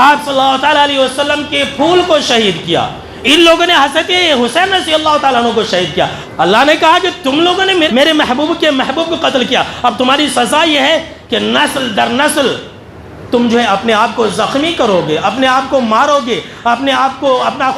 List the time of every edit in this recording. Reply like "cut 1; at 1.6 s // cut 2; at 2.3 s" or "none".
cut 1; at 6.2 s // cut 2; at 7.9 s